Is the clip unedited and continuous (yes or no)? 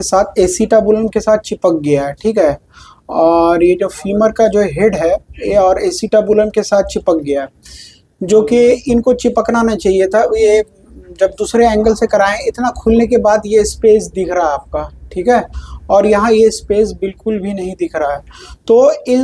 yes